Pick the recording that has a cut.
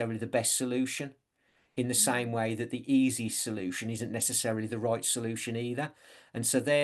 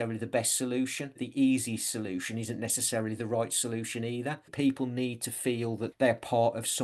second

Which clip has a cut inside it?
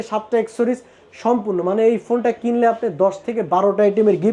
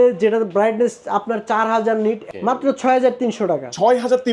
second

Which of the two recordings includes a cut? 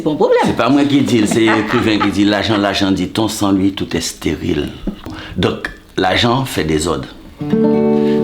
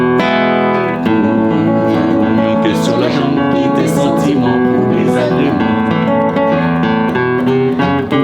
first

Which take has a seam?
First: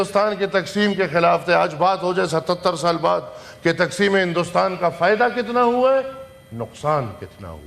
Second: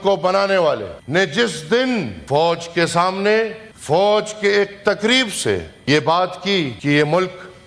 second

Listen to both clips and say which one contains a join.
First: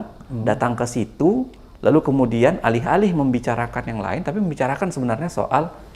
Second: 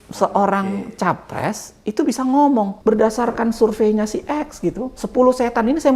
second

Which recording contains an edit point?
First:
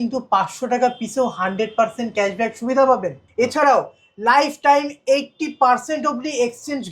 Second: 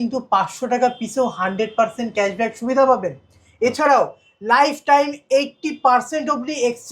first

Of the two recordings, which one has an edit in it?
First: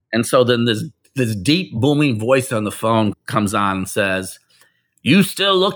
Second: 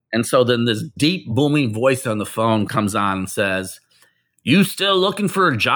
second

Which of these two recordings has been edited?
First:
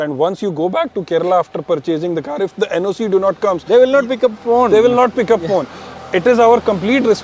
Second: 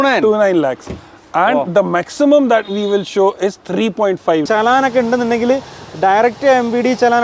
second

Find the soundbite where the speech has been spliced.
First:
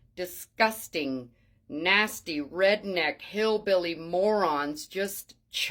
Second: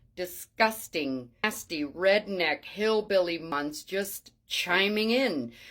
second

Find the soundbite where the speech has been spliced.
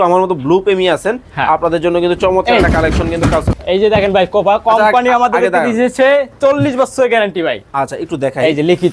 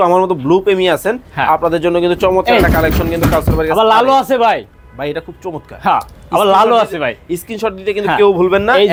first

